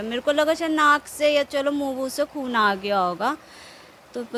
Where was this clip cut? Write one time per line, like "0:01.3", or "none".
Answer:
none